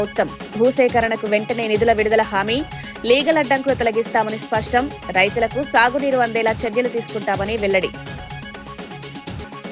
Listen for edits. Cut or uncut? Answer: uncut